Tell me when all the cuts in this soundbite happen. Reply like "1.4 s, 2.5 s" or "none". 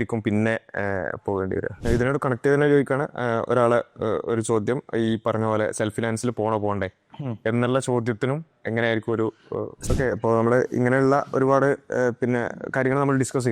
1.7 s, 9.8 s